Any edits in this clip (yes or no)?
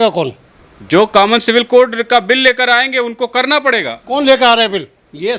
no